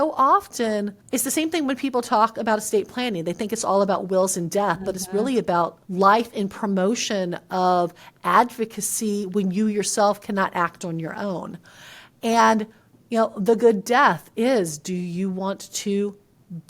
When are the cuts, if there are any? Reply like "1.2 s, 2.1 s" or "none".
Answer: 1.0 s, 5.8 s